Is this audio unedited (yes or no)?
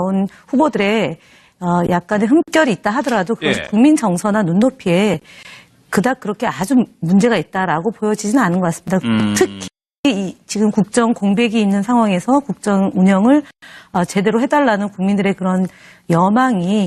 yes